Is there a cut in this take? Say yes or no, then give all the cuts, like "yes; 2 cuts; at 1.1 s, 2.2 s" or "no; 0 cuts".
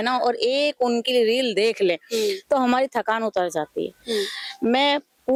no; 0 cuts